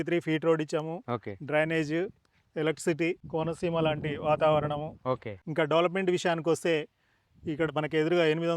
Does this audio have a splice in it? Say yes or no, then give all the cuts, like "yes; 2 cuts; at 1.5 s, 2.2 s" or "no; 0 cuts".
yes; 2 cuts; at 3.2 s, 5.3 s